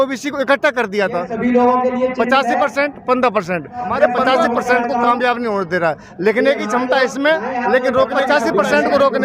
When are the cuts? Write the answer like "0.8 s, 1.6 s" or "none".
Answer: 4.2 s, 8.2 s